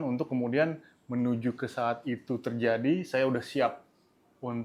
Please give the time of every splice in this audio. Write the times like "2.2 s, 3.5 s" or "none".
none